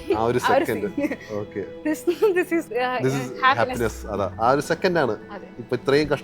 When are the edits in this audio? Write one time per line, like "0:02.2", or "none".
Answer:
0:02.7
0:04.3